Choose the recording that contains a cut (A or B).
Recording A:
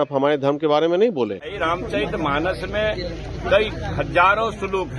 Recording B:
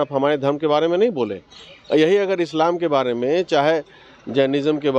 A